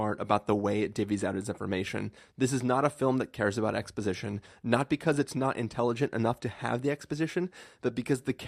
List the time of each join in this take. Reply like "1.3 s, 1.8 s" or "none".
none